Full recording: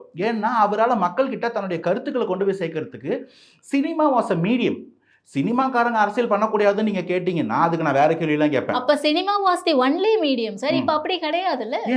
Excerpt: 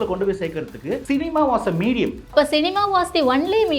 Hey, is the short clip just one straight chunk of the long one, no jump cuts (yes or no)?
no